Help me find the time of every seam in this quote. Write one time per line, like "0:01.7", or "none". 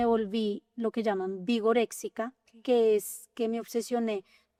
none